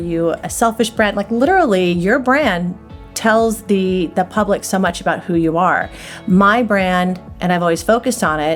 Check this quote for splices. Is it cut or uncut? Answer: uncut